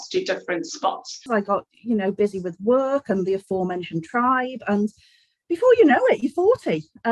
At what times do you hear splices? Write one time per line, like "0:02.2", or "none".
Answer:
0:01.3